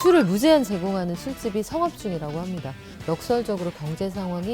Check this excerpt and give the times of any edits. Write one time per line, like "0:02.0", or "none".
0:02.9